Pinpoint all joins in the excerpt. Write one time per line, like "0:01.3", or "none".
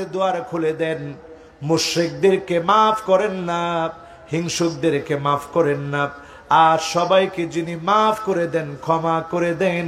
none